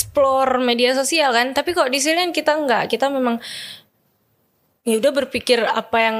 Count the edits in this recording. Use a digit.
0